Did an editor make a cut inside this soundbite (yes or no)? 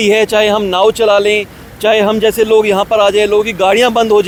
no